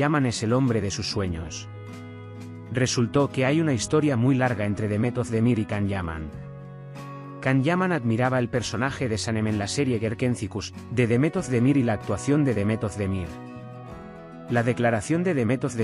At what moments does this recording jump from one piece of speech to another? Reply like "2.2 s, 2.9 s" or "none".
1.4 s, 2.7 s